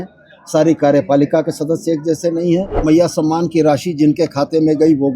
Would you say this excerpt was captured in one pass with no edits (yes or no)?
no